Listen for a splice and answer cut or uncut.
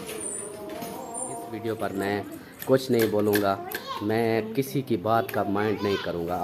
cut